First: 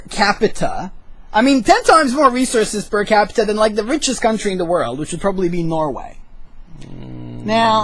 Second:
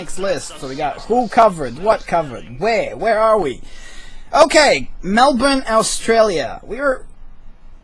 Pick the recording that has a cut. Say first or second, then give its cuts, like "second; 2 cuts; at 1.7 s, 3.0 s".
first; 1 cut; at 2.8 s